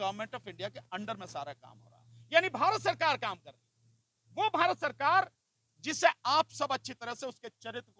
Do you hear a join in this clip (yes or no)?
no